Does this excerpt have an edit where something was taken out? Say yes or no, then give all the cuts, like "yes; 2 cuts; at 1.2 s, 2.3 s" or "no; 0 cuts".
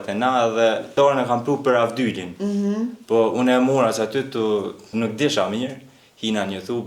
yes; 2 cuts; at 0.9 s, 4.9 s